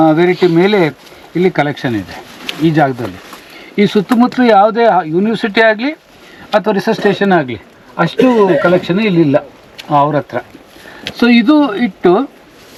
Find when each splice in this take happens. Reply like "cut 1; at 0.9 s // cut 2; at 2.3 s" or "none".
none

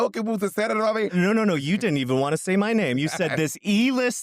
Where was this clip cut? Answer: cut 1; at 1.1 s

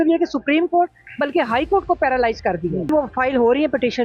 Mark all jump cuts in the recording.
cut 1; at 2.9 s

